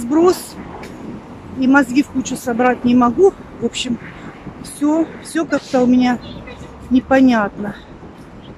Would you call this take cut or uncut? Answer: uncut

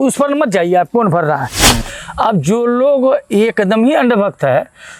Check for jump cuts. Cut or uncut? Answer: cut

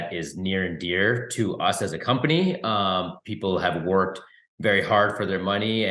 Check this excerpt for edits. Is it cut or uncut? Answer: uncut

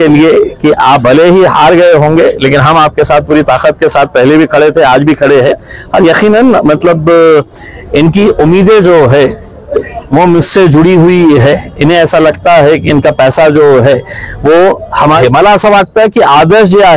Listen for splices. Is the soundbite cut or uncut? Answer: cut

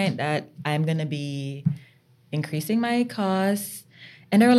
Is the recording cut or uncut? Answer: uncut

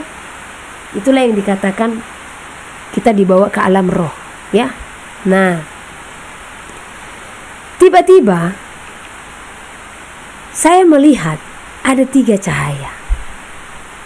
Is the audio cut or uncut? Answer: uncut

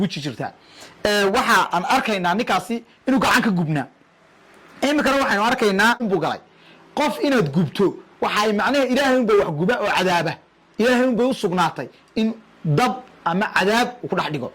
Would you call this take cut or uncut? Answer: cut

